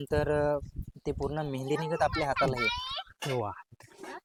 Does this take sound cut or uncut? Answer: uncut